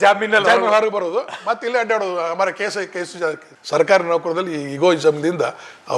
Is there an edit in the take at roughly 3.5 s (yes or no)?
yes